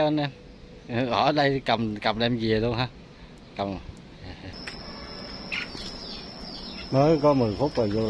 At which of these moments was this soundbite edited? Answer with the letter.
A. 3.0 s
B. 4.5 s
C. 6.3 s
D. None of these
B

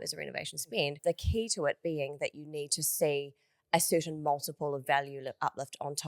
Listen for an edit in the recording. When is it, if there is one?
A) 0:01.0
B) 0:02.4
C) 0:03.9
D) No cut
A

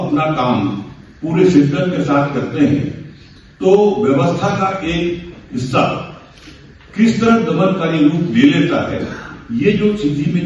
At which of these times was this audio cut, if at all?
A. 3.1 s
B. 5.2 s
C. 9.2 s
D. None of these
D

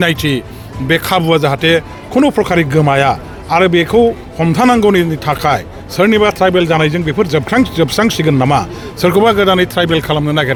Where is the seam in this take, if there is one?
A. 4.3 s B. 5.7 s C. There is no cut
C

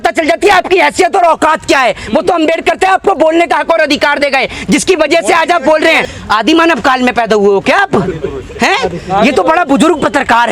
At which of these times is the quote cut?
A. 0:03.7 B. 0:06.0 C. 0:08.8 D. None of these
B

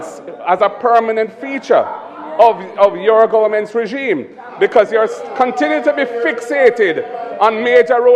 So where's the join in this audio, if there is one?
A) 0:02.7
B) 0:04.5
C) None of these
C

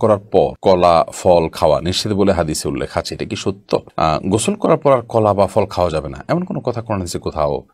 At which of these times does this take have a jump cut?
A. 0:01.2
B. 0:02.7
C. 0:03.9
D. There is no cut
D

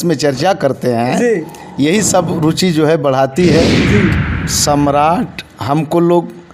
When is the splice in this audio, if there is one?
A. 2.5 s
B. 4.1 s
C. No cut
B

